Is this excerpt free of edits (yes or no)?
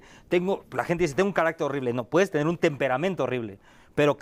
yes